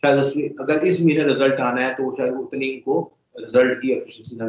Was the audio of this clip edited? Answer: no; 0 cuts

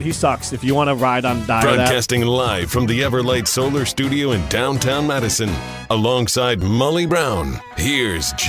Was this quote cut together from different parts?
yes; 1 cut; at 1.9 s

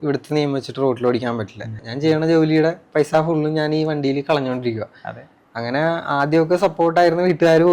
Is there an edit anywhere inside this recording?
yes; 1 cut; at 1.8 s

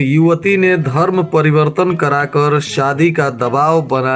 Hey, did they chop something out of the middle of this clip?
no; 0 cuts

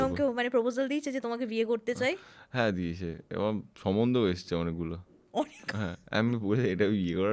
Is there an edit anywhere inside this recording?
no; 0 cuts

